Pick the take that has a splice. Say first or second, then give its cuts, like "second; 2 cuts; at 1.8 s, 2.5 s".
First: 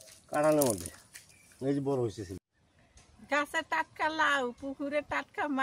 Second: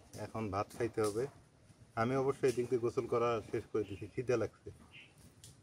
first; 1 cut; at 2.4 s